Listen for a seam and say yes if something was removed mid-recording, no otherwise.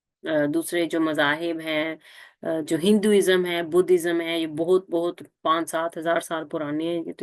no